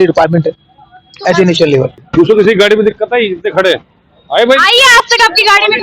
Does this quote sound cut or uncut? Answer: cut